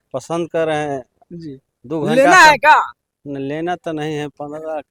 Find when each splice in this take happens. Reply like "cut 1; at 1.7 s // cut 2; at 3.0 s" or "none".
none